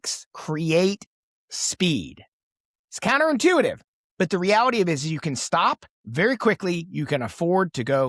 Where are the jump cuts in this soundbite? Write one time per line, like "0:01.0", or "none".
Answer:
none